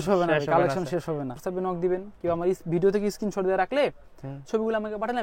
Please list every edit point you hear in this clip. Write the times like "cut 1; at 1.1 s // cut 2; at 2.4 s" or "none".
cut 1; at 1.4 s